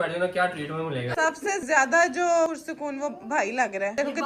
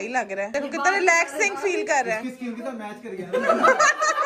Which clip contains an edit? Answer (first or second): first